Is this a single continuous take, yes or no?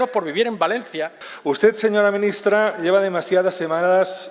no